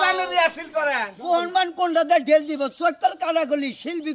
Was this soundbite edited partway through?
yes; 1 cut; at 1.1 s

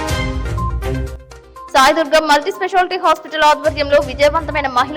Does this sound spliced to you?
yes; 1 cut; at 1.0 s

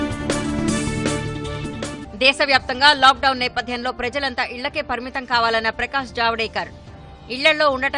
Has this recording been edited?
yes; 1 cut; at 2.0 s

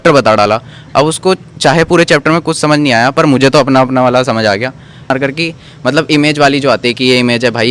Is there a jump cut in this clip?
yes; 1 cut; at 5.1 s

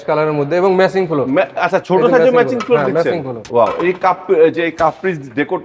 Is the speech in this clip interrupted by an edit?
yes; 1 cut; at 3.3 s

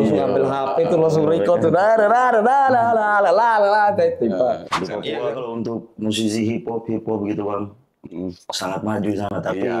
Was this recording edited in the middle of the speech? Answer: yes; 1 cut; at 4.7 s

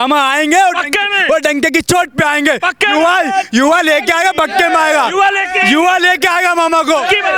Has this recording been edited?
no; 0 cuts

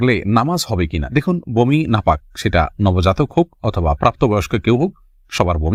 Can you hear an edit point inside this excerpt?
no; 0 cuts

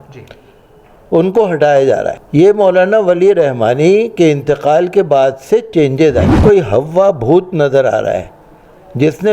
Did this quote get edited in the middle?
yes; 2 cuts; at 2.2 s, 6.3 s

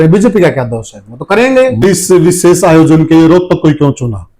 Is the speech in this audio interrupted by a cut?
yes; 1 cut; at 1.8 s

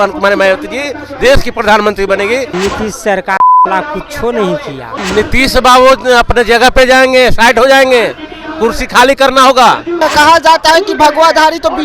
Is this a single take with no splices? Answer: no; 3 cuts; at 2.5 s, 4.9 s, 9.9 s

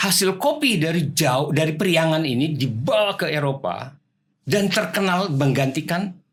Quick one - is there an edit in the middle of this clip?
no; 0 cuts

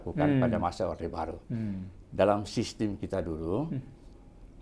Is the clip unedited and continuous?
yes; 0 cuts

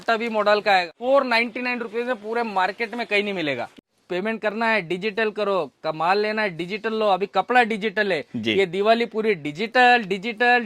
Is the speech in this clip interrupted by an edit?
yes; 2 cuts; at 0.9 s, 3.7 s

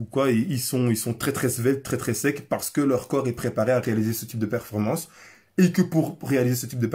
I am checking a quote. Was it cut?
no; 0 cuts

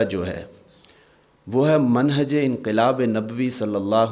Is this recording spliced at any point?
no; 0 cuts

